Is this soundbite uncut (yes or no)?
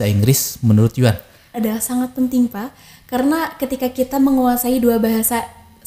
no